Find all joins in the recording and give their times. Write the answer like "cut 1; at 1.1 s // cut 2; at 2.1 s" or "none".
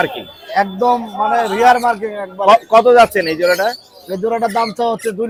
none